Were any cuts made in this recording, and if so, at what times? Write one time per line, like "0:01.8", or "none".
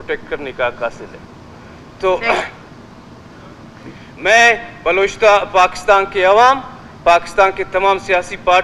none